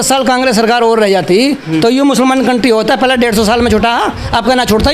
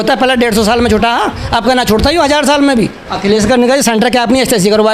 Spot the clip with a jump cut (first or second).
second